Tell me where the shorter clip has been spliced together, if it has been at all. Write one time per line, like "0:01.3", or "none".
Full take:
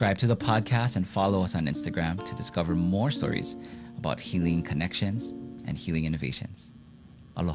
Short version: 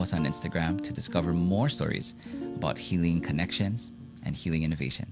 none